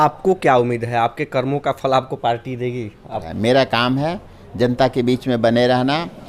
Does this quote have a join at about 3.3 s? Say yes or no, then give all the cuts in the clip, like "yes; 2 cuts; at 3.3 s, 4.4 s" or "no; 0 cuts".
yes; 1 cut; at 3.3 s